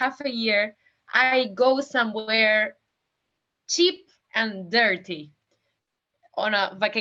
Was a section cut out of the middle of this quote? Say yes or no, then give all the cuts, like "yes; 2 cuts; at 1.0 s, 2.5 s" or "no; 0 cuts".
no; 0 cuts